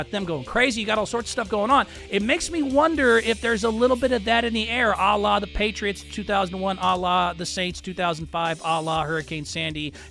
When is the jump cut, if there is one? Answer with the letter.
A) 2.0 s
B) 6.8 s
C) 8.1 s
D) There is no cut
D